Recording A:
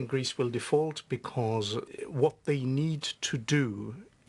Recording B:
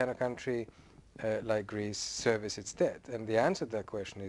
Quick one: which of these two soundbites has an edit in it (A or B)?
A